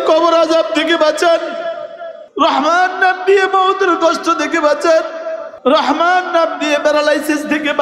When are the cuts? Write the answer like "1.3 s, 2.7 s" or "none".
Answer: none